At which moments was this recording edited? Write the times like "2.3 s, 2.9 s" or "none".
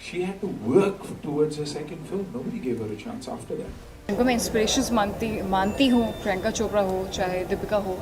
4.1 s